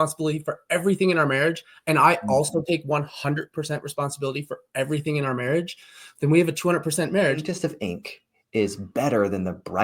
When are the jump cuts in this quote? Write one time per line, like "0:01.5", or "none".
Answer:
0:07.5